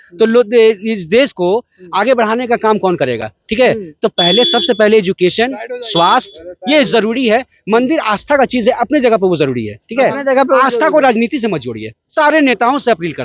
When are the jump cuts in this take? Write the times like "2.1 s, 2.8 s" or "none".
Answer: none